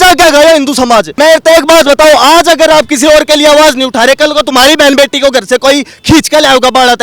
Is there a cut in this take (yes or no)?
yes